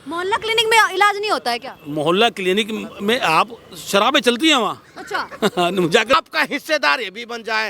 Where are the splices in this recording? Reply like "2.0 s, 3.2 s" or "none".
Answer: 6.2 s